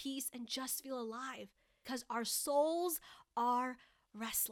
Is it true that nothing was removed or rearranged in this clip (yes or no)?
no